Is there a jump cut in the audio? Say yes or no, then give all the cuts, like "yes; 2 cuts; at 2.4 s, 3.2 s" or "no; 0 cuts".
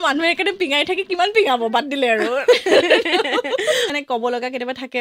yes; 1 cut; at 3.9 s